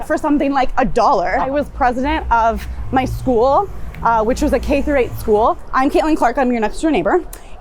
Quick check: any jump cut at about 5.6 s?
yes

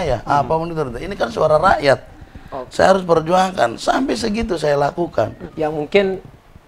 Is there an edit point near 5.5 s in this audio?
yes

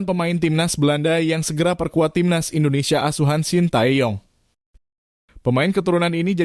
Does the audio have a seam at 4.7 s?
yes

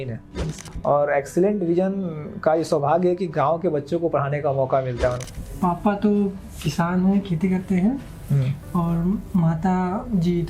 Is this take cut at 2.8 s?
no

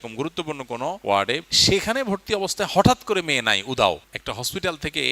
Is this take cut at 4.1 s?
yes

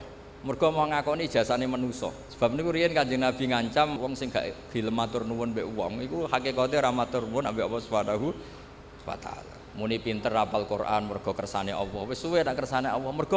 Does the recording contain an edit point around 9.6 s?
yes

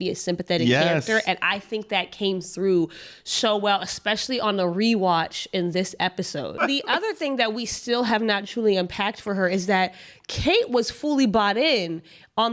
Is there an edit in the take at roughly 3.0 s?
no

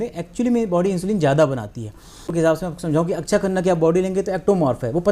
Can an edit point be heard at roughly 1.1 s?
no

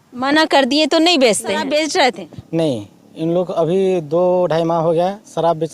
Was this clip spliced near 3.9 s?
no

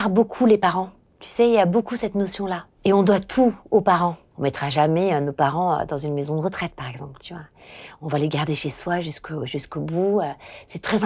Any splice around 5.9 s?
no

